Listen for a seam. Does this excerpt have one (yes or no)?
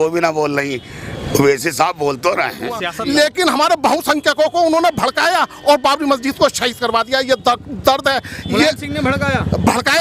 yes